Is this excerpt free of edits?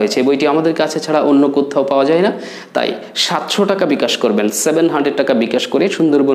yes; 0 cuts

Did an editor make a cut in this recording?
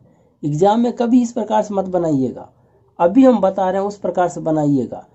no; 0 cuts

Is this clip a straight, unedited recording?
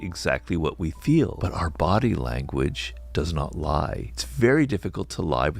no; 2 cuts; at 1.4 s, 4.1 s

